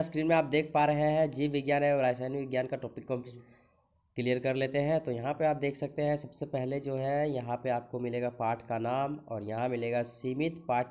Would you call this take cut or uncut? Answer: cut